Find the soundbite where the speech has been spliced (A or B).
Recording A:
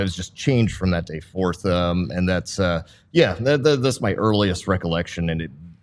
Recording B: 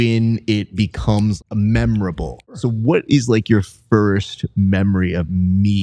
B